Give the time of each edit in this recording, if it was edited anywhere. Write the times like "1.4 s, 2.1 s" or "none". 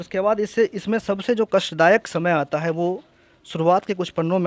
none